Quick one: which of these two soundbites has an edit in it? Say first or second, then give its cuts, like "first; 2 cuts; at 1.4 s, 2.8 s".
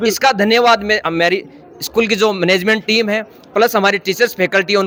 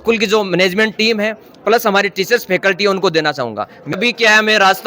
second; 1 cut; at 4.0 s